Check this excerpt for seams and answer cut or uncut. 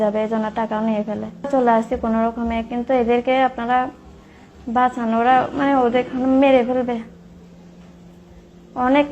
cut